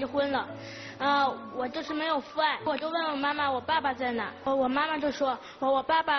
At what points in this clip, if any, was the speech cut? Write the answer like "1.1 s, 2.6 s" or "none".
2.6 s, 4.5 s